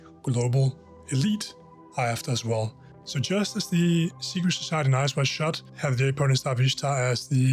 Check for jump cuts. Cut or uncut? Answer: cut